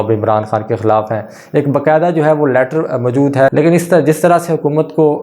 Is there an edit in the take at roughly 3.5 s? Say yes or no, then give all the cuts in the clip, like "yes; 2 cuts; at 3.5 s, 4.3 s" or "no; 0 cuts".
yes; 1 cut; at 3.5 s